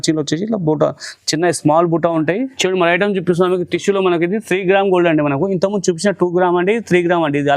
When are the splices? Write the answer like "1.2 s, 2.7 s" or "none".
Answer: 2.5 s